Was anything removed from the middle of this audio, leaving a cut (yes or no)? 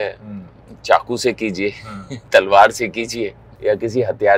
yes